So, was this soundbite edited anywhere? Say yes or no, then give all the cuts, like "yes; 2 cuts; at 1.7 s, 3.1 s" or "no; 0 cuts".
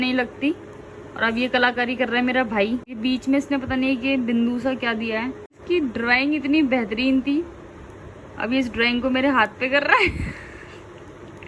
yes; 2 cuts; at 3.0 s, 5.6 s